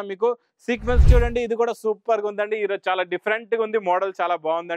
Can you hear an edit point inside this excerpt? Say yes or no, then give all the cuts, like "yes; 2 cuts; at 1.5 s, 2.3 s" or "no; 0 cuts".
yes; 1 cut; at 1.0 s